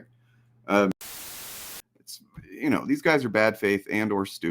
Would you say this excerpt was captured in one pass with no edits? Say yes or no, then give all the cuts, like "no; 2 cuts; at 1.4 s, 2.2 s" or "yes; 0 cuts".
no; 1 cut; at 1.4 s